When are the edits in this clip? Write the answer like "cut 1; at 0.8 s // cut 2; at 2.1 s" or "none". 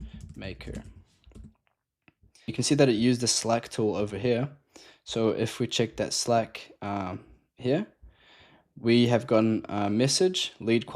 cut 1; at 2.5 s